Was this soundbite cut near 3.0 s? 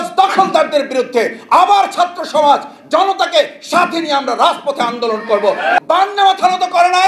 no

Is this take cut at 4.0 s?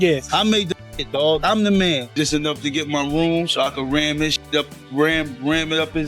no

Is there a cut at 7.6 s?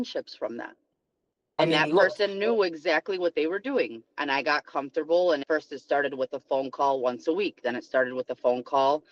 no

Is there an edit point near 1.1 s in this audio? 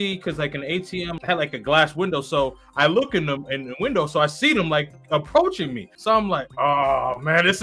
yes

